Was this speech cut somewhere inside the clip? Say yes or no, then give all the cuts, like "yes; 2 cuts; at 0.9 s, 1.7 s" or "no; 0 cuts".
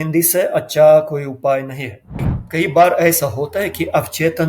yes; 1 cut; at 2.4 s